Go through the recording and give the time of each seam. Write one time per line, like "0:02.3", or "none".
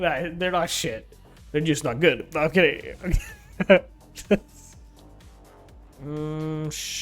0:04.5
0:05.9